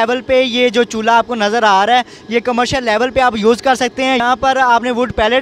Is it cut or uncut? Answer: cut